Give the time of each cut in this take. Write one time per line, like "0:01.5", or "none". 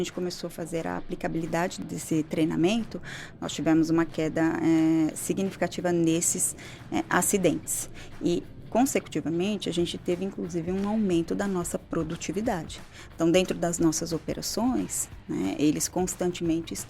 0:01.8